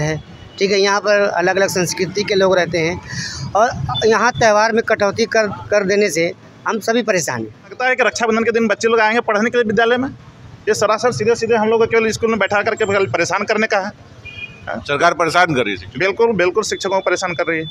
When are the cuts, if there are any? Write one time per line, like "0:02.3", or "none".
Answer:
0:07.7